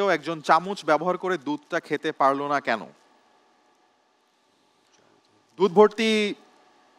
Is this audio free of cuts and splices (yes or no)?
yes